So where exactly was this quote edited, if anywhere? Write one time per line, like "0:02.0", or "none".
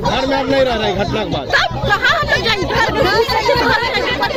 none